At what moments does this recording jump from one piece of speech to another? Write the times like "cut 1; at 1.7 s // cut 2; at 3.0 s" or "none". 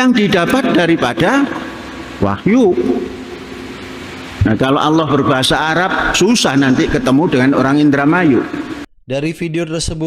cut 1; at 8.9 s